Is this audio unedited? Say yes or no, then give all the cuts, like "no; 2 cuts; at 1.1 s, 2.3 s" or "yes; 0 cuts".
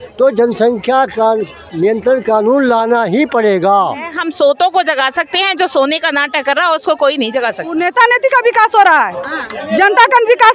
no; 2 cuts; at 4.2 s, 7.8 s